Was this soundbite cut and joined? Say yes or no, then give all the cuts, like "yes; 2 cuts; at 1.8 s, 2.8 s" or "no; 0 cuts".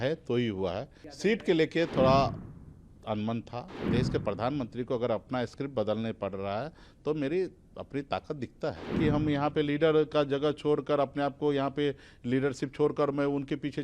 yes; 3 cuts; at 1.0 s, 3.8 s, 8.9 s